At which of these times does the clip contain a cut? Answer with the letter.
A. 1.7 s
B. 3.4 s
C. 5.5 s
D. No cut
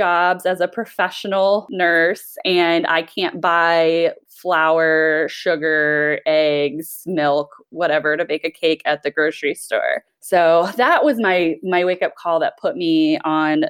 A